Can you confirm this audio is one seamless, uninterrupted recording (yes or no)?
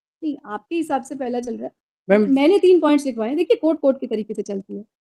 yes